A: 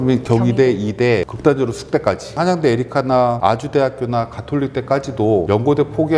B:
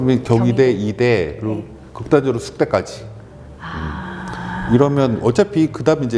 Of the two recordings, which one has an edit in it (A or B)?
A